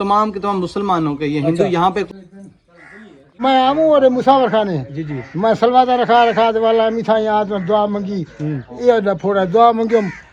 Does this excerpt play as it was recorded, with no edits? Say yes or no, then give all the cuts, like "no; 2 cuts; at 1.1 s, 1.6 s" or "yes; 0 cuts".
no; 1 cut; at 2.1 s